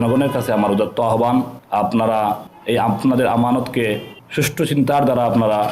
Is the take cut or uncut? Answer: cut